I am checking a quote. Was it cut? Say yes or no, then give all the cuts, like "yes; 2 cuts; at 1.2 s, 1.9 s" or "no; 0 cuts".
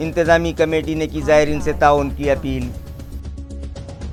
no; 0 cuts